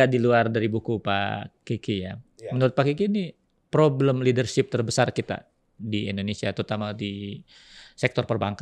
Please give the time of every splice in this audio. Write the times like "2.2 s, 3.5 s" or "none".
none